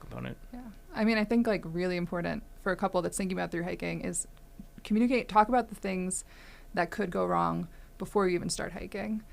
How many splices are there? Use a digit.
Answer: 1